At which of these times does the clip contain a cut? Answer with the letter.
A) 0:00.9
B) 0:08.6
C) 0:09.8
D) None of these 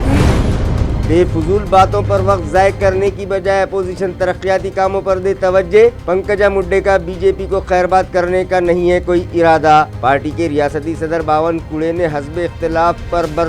A